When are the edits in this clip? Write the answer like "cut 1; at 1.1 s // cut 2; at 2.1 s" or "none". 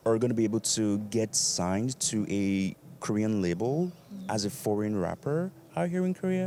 none